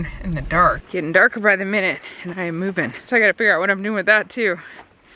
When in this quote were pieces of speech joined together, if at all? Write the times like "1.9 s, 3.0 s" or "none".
0.8 s, 3.0 s